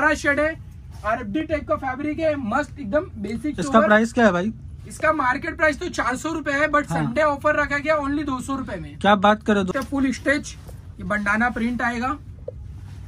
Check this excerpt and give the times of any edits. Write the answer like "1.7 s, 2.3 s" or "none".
9.7 s